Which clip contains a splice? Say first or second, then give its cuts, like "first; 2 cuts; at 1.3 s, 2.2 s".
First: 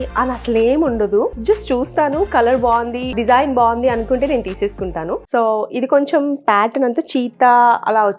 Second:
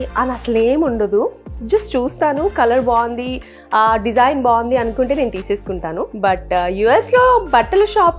first; 3 cuts; at 1.4 s, 3.2 s, 5.2 s